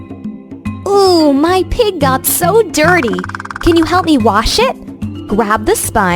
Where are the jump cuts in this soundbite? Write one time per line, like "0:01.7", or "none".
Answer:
none